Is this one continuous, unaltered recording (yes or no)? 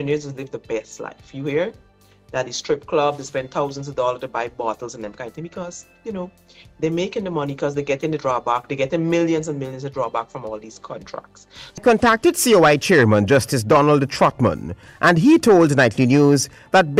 no